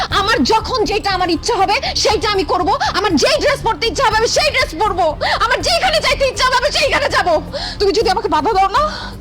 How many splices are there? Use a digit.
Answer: 1